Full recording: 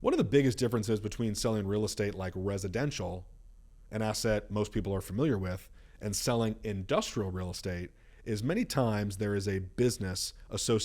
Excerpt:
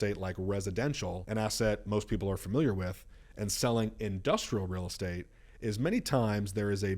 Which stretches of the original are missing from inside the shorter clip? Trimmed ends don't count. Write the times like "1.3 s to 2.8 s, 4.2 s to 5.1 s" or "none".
3.2 s to 3.9 s